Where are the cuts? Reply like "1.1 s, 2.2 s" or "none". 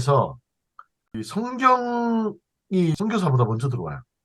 1.2 s, 3.0 s